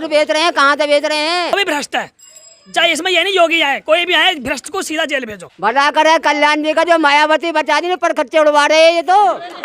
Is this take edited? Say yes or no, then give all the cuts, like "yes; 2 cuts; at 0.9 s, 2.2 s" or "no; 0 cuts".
yes; 2 cuts; at 1.5 s, 5.4 s